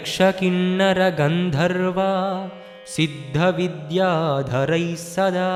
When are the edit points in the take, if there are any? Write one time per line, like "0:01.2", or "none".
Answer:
none